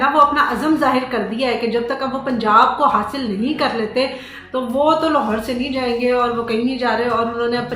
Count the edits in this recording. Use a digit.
0